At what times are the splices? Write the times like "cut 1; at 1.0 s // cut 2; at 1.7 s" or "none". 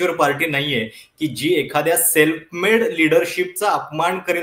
none